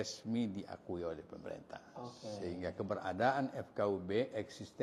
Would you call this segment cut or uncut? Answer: uncut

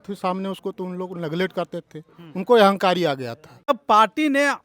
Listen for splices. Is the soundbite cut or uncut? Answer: cut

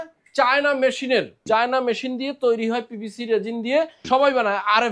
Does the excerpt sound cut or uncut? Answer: cut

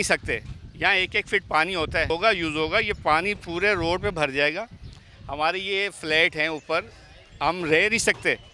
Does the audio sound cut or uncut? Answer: cut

